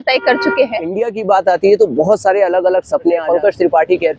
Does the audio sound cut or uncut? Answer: cut